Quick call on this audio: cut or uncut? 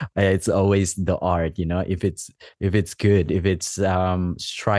uncut